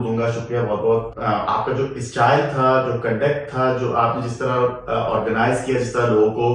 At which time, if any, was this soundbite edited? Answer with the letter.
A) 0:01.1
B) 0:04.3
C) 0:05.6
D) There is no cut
A